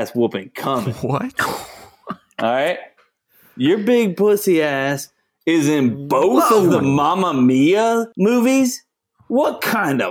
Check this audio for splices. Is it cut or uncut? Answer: cut